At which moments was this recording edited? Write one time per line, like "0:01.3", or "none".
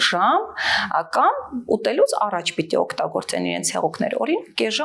none